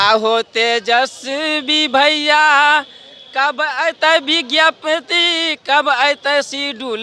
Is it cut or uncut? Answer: uncut